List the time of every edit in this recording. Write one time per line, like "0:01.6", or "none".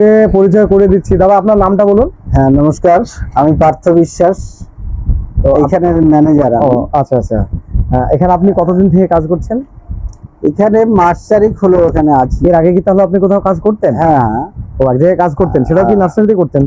none